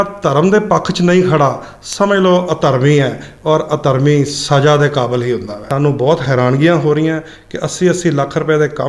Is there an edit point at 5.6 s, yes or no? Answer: yes